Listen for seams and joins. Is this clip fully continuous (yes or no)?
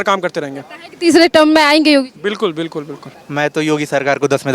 no